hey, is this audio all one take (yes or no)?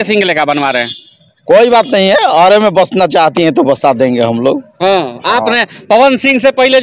yes